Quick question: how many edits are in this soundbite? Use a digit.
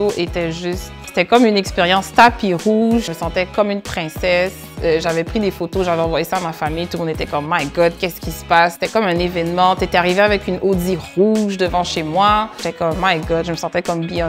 3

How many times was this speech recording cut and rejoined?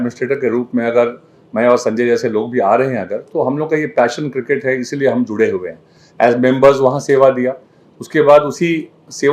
0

